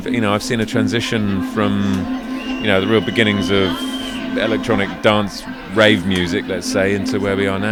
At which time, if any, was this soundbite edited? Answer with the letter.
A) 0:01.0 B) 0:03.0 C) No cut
C